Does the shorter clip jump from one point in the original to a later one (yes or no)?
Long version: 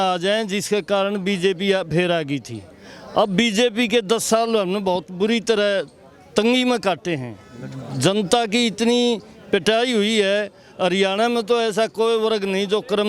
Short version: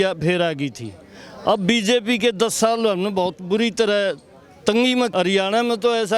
yes